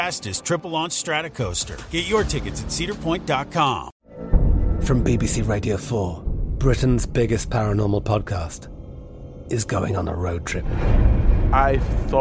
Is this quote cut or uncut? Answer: cut